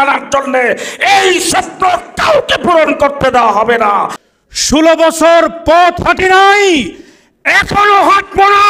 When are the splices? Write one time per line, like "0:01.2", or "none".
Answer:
0:04.2